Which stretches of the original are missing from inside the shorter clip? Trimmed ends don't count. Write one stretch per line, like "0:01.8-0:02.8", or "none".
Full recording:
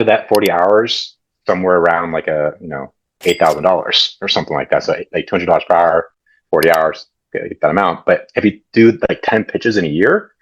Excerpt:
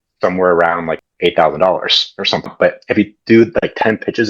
0:02.2-0:03.0
0:04.5-0:07.9